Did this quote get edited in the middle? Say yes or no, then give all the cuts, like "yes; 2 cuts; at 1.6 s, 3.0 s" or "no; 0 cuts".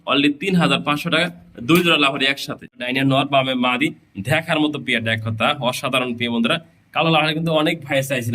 yes; 1 cut; at 2.8 s